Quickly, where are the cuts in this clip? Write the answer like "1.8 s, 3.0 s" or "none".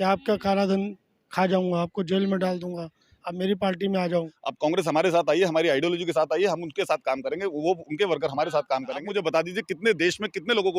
4.4 s, 9.1 s